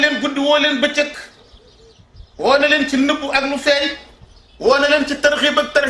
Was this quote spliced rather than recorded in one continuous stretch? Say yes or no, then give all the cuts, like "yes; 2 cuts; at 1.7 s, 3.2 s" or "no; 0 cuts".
no; 0 cuts